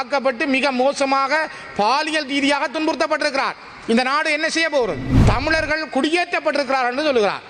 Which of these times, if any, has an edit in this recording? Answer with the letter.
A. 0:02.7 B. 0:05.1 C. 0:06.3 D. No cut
B